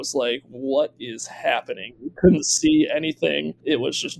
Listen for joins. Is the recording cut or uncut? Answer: uncut